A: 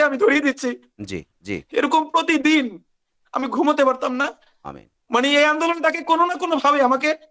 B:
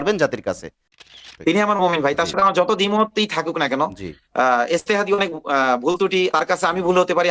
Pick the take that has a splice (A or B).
B